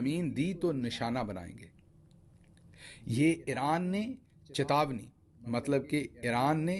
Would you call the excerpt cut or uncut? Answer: uncut